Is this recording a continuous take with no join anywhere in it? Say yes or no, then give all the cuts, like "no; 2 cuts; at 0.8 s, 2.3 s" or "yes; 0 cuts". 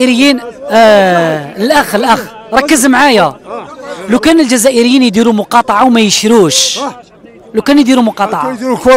yes; 0 cuts